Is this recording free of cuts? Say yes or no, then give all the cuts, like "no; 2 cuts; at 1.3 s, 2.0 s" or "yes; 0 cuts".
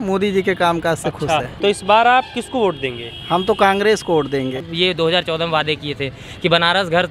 no; 2 cuts; at 1.5 s, 4.6 s